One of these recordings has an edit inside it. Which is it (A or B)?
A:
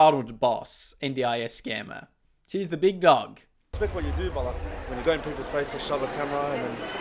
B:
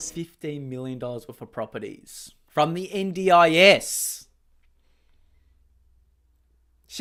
A